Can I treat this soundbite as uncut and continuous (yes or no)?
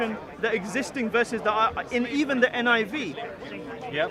yes